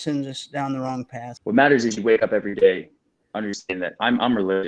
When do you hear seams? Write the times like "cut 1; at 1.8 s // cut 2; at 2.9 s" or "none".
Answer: cut 1; at 1.2 s